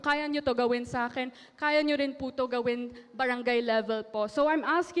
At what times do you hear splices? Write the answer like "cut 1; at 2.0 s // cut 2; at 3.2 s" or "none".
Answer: none